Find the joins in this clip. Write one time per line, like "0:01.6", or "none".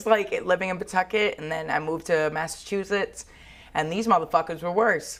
none